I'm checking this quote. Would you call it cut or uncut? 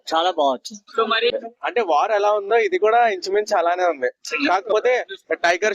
cut